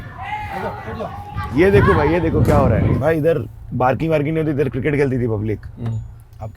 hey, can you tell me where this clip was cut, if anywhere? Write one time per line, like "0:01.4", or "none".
0:02.9

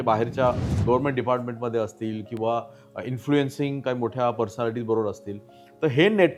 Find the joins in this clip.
none

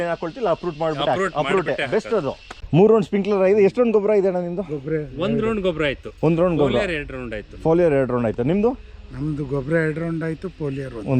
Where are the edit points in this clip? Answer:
0:02.5

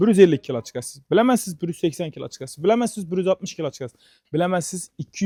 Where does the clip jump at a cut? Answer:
none

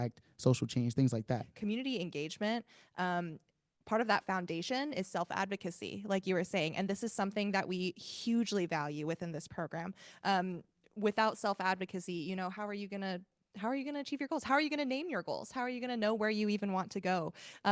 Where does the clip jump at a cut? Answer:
0:01.5

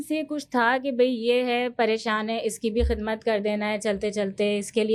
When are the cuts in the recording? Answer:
none

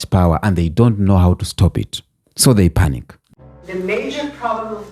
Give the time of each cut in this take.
0:03.2

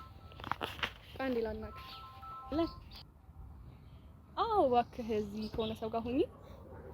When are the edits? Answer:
0:02.5

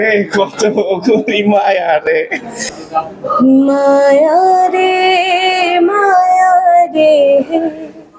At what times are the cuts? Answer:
0:02.6

